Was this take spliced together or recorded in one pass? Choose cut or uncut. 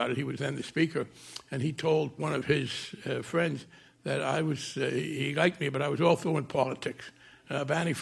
cut